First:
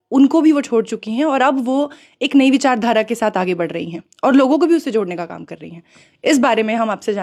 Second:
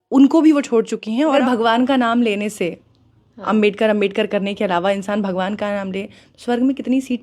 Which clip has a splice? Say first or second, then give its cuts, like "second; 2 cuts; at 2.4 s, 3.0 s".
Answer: second; 1 cut; at 1.4 s